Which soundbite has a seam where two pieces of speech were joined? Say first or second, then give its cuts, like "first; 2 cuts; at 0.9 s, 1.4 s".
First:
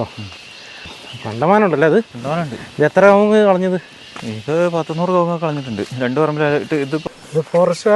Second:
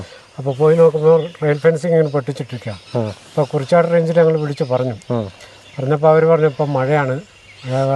first; 2 cuts; at 0.9 s, 7.0 s